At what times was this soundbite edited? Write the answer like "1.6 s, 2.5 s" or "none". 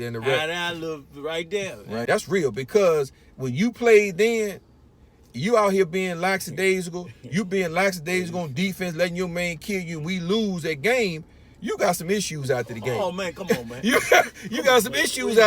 2.0 s